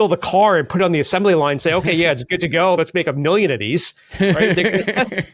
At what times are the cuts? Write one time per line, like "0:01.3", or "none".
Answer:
0:02.8